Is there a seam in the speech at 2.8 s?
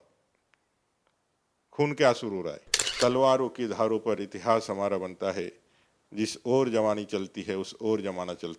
yes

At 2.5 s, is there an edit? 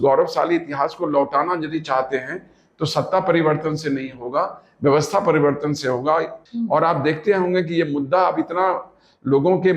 no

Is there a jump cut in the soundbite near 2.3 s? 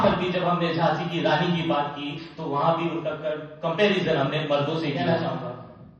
no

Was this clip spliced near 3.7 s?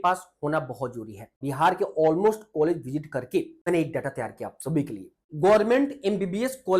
yes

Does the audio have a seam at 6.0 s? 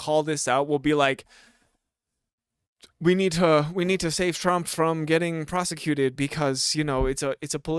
no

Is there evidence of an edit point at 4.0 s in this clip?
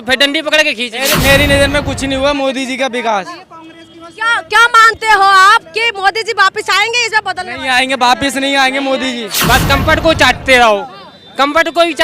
no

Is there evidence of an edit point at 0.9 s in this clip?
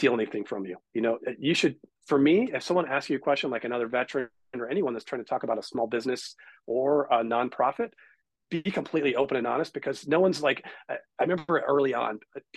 no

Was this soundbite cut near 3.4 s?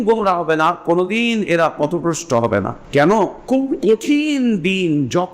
yes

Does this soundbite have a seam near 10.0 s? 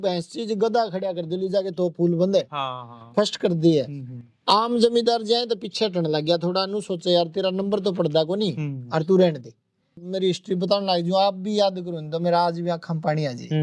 yes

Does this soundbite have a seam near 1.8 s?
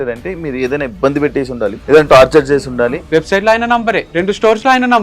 yes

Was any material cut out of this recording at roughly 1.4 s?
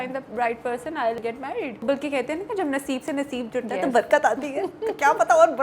yes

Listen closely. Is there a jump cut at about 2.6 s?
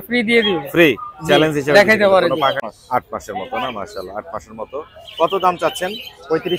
yes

